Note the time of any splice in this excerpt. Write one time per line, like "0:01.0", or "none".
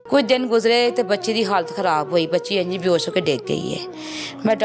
none